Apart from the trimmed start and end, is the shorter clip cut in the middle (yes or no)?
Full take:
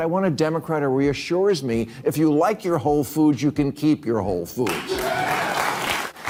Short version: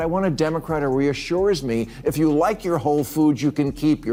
no